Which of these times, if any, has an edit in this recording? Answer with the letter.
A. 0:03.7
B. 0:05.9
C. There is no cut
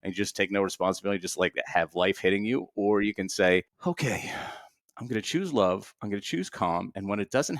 A